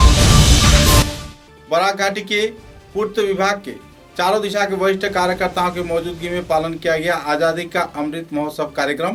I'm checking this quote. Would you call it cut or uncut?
uncut